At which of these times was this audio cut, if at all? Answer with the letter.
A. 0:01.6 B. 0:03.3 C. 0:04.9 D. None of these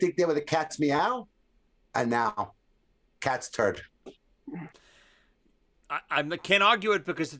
D